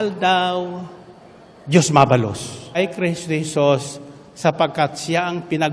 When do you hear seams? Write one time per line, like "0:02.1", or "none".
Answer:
0:02.8